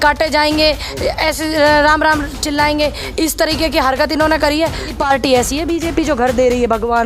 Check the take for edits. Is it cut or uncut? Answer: cut